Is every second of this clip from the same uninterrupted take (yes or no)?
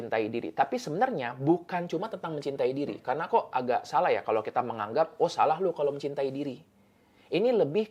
yes